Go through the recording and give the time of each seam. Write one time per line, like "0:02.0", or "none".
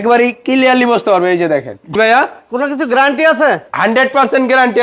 0:01.9